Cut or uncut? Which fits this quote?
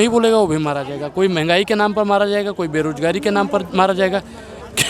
uncut